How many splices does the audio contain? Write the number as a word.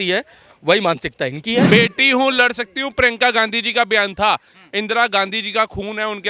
one